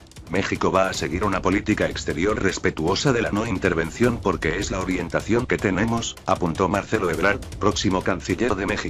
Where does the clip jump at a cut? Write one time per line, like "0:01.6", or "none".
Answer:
0:06.4